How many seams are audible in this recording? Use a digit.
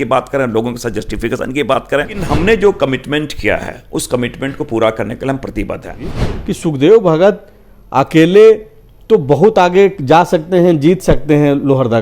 2